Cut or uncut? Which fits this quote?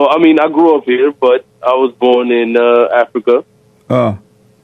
uncut